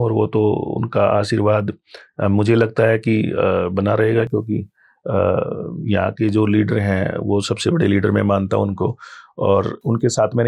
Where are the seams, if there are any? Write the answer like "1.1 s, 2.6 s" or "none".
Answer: none